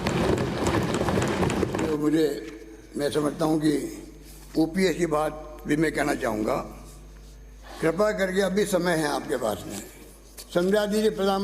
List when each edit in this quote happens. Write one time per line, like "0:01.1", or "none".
0:01.9